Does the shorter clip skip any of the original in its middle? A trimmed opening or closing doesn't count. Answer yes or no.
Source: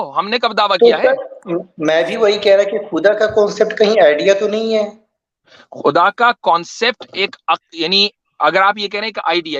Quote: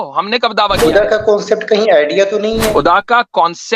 yes